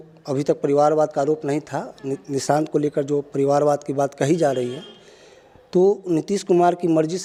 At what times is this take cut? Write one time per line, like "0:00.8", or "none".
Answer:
none